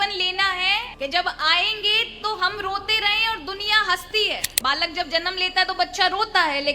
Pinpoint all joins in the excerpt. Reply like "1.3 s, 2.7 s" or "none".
0.9 s, 4.5 s